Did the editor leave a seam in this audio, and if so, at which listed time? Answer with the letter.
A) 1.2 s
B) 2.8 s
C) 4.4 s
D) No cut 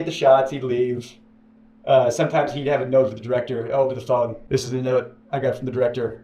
C